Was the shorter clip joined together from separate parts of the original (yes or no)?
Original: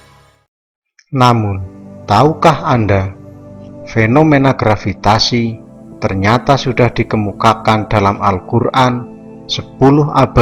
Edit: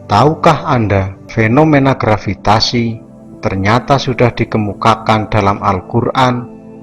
yes